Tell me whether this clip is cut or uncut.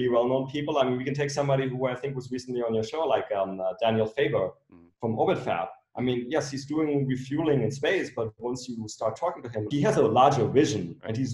cut